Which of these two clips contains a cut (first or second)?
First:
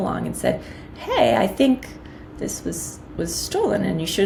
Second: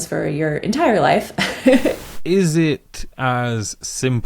second